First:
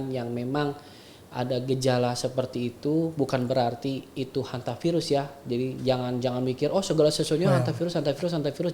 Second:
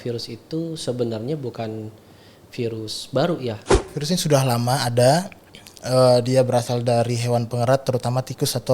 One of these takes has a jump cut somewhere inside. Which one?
second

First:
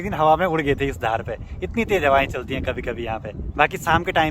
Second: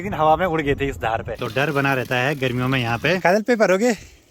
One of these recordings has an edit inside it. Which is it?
second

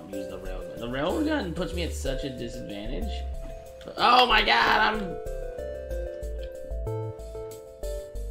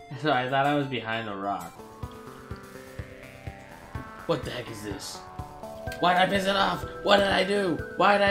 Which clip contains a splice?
second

